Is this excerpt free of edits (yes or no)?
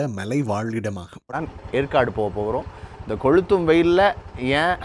no